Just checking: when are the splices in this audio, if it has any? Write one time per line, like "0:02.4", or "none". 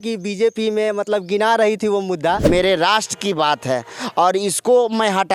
0:02.4